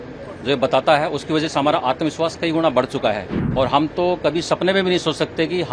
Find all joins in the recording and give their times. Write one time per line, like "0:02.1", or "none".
0:03.4